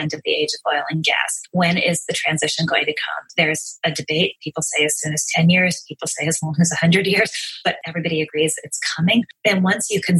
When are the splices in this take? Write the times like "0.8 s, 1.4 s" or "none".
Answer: 1.3 s, 3.3 s, 7.8 s, 9.3 s